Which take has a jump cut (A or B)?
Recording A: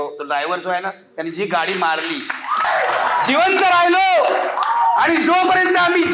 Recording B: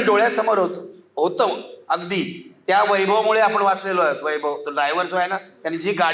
A